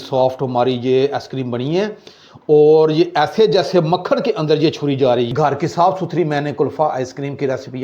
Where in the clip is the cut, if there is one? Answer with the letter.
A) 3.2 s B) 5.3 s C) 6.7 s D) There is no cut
B